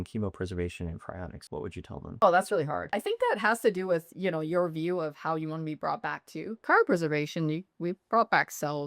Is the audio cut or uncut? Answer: cut